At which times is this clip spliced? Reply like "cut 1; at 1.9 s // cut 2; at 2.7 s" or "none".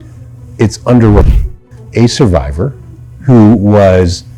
cut 1; at 1.4 s